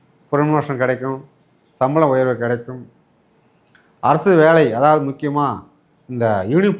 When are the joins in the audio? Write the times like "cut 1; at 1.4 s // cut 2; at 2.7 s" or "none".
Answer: none